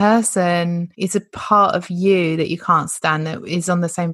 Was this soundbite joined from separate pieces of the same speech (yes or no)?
yes